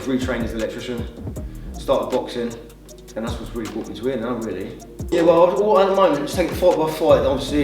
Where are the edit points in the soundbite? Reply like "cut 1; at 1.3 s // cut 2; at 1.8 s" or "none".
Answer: cut 1; at 5.0 s

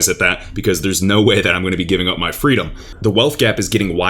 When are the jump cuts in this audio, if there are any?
cut 1; at 2.8 s

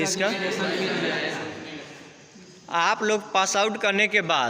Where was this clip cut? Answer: none

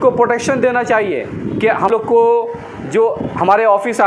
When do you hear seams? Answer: none

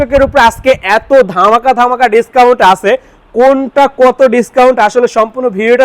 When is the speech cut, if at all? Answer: none

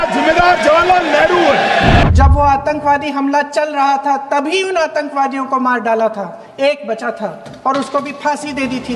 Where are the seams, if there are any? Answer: cut 1; at 2.0 s

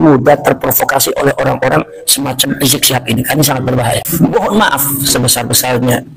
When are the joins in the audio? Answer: cut 1; at 4.1 s

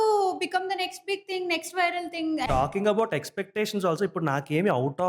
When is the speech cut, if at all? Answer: cut 1; at 2.5 s

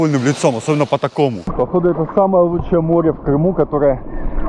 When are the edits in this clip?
cut 1; at 1.5 s

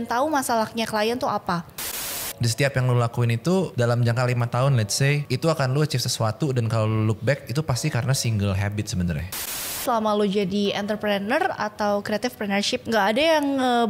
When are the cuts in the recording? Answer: cut 1; at 1.8 s // cut 2; at 3.7 s // cut 3; at 5.2 s // cut 4; at 9.8 s // cut 5; at 12.8 s

